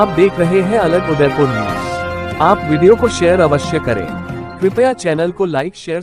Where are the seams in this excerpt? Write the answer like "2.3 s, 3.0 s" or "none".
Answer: none